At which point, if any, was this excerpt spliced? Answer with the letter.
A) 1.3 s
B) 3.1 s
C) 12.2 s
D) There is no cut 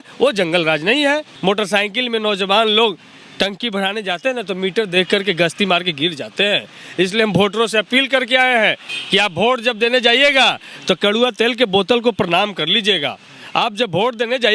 A